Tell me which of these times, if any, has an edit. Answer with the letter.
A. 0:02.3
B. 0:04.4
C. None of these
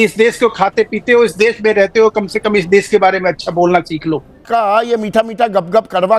B